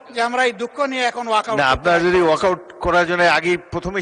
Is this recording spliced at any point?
no; 0 cuts

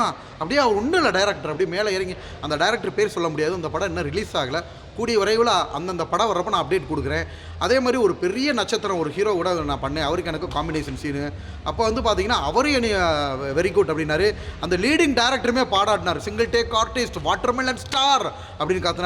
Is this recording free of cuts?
yes; 0 cuts

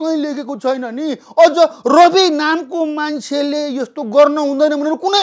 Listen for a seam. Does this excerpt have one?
no; 0 cuts

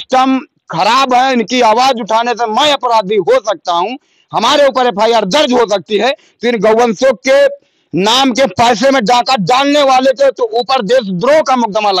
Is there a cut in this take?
no; 0 cuts

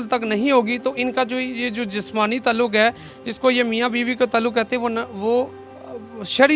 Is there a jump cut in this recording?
no; 0 cuts

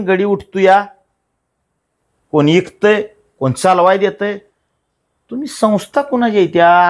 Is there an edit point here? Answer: no; 0 cuts

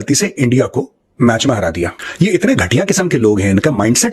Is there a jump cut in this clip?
yes; 1 cut; at 2.0 s

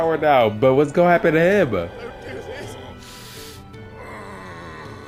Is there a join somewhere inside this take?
no; 0 cuts

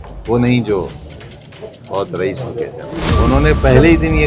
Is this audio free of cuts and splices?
no; 1 cut; at 3.1 s

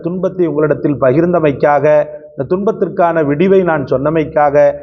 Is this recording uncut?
yes; 0 cuts

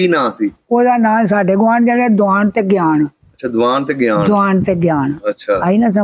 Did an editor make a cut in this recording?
no; 0 cuts

